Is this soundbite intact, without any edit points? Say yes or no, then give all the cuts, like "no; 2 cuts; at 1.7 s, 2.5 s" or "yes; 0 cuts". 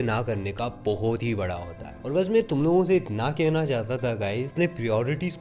yes; 0 cuts